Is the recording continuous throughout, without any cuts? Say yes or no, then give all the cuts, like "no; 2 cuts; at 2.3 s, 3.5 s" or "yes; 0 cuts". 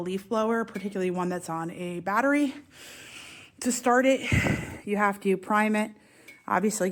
yes; 0 cuts